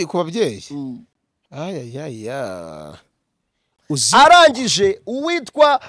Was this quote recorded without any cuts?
yes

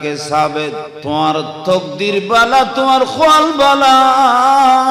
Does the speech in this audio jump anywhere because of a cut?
yes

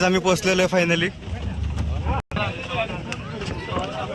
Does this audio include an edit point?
no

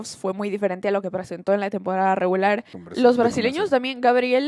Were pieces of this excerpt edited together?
yes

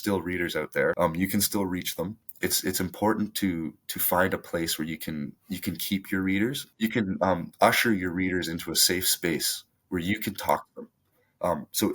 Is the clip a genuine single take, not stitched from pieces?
no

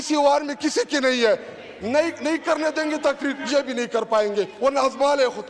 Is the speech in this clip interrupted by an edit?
no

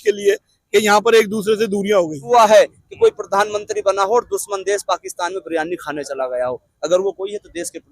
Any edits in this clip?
yes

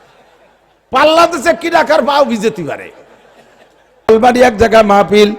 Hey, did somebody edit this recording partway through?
yes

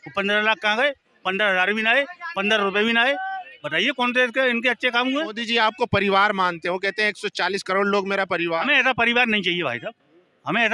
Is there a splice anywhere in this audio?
yes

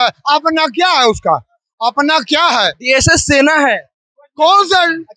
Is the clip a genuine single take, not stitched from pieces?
yes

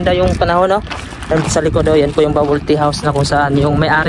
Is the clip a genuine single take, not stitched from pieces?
yes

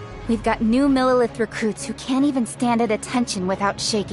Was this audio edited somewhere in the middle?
no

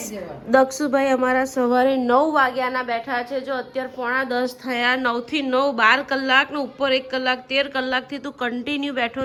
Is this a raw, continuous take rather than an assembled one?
yes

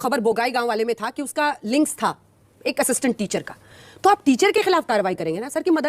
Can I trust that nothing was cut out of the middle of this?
yes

